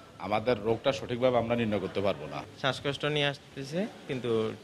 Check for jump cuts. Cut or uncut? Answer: uncut